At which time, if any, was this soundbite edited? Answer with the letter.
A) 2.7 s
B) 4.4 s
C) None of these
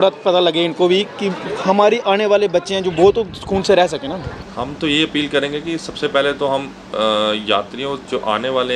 B